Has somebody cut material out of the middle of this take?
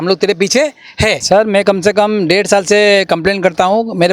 yes; 1 cut; at 1.2 s

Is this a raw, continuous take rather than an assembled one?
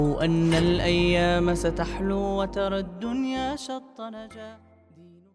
yes; 0 cuts

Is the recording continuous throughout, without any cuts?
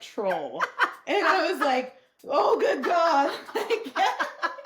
yes; 0 cuts

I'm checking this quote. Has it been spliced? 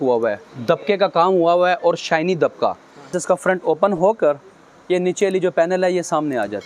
yes; 1 cut; at 3.1 s

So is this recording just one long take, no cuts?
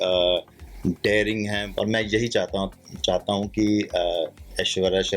no; 1 cut; at 1.6 s

